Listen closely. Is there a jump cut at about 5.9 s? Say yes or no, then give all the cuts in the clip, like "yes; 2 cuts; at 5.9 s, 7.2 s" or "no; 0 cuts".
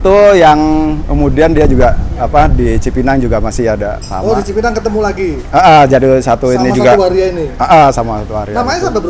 no; 0 cuts